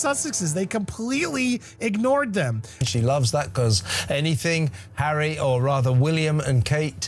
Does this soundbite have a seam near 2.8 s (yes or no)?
yes